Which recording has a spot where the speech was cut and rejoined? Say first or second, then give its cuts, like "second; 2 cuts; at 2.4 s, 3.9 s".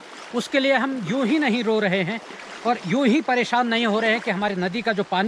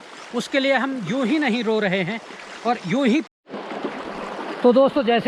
second; 1 cut; at 3.2 s